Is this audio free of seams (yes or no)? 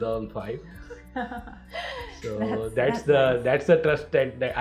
yes